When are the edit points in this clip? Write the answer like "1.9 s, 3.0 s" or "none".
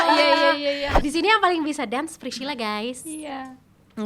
0.9 s

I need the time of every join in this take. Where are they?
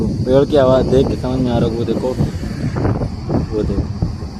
none

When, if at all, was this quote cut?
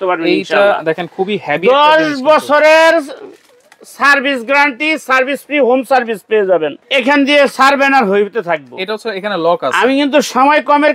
6.8 s

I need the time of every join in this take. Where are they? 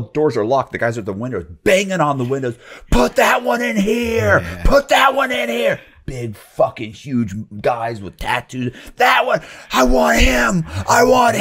none

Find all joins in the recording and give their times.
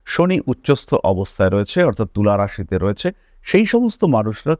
none

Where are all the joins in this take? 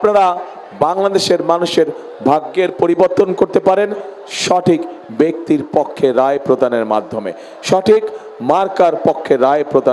none

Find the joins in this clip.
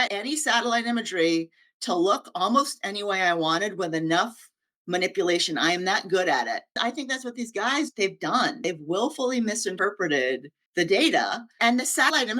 6.7 s, 10.5 s, 11.5 s

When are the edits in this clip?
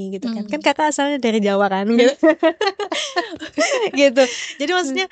none

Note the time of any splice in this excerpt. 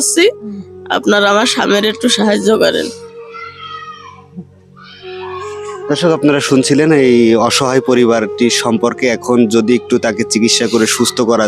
none

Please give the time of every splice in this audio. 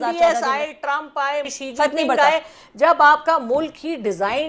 1.5 s

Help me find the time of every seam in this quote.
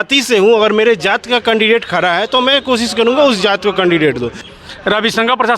4.4 s

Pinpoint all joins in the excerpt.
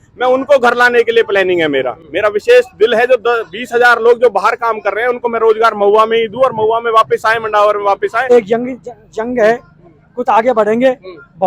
8.3 s

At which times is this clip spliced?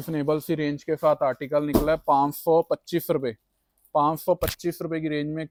none

